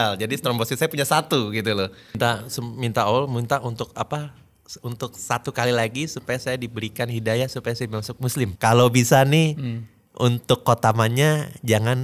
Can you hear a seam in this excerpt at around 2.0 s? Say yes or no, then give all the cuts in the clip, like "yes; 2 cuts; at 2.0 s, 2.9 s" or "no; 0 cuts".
yes; 2 cuts; at 2.0 s, 8.5 s